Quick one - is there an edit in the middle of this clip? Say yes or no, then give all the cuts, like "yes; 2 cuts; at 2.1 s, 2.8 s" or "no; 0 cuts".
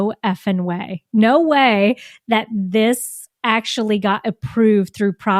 no; 0 cuts